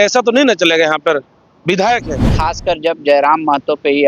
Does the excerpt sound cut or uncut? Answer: cut